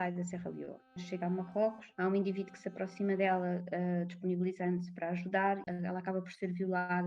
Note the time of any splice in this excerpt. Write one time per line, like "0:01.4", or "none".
0:01.0
0:01.8
0:05.6